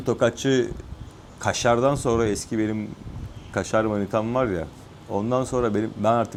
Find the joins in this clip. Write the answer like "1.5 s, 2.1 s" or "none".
none